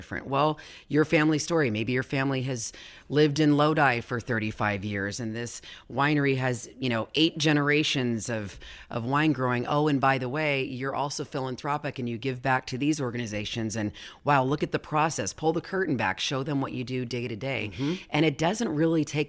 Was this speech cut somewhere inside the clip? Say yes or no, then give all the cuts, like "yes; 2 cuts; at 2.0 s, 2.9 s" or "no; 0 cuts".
no; 0 cuts